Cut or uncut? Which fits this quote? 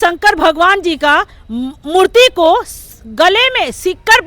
uncut